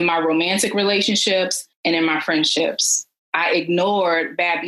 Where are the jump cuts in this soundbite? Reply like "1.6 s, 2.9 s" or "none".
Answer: none